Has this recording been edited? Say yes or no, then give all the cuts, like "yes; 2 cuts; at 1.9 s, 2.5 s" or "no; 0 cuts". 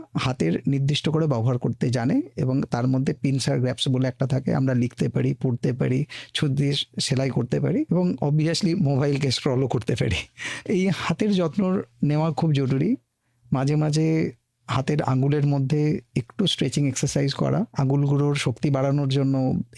yes; 3 cuts; at 7.9 s, 10.5 s, 17.7 s